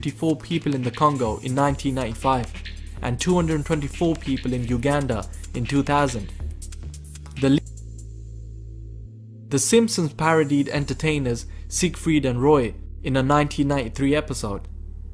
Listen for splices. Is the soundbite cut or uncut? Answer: cut